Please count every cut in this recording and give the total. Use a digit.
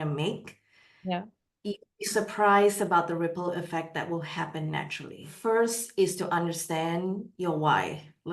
1